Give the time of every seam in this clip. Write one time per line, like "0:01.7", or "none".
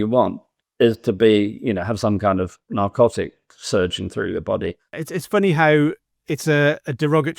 0:05.0